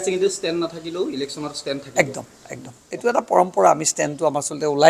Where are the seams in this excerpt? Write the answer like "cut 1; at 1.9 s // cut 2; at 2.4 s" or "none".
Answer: none